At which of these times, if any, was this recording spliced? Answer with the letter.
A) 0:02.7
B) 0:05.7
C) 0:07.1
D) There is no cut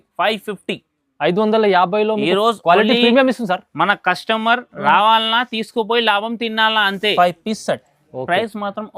C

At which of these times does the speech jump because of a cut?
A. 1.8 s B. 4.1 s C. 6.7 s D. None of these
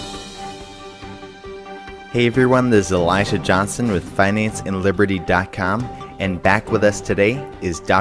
D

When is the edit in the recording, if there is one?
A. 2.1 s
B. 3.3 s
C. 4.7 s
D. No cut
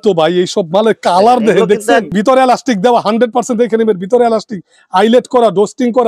A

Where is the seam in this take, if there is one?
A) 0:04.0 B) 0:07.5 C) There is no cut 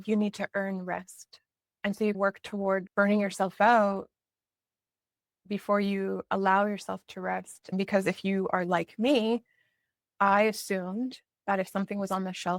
B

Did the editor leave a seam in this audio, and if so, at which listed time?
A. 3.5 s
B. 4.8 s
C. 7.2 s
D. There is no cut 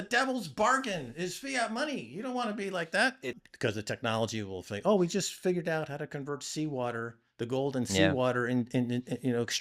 A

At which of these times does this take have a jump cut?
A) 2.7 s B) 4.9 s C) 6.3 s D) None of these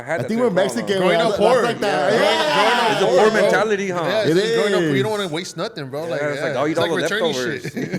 D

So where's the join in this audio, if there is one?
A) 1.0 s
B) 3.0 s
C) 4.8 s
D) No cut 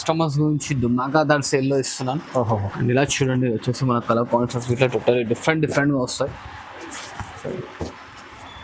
D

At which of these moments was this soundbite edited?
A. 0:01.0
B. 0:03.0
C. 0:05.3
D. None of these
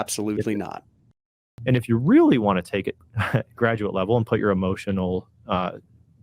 A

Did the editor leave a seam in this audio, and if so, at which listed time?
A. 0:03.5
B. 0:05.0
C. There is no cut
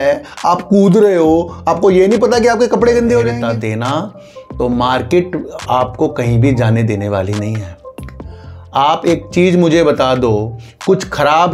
A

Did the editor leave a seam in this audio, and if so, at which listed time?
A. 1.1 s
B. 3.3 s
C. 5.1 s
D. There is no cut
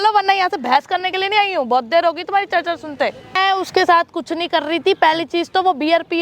B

